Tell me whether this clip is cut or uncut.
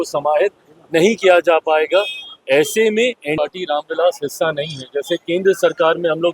cut